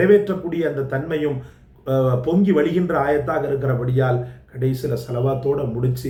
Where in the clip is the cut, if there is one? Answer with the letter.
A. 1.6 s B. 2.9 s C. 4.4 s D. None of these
D